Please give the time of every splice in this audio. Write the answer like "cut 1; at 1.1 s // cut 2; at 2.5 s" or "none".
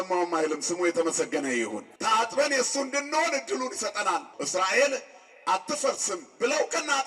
cut 1; at 1.9 s // cut 2; at 4.4 s